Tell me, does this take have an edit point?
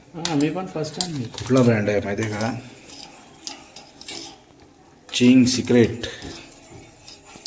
no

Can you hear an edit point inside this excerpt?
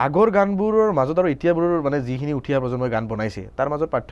no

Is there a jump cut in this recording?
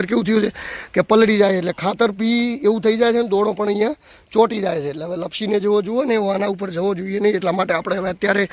no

